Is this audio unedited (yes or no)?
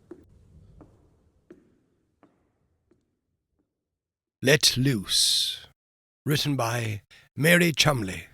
no